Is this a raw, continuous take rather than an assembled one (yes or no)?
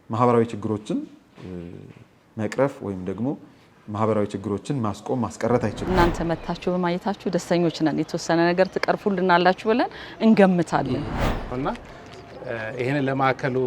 no